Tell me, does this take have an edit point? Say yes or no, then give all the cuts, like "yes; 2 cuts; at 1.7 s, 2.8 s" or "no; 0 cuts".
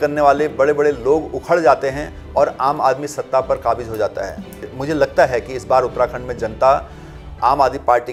no; 0 cuts